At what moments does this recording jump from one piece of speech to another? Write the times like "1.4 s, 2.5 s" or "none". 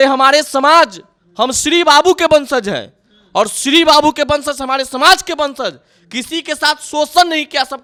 none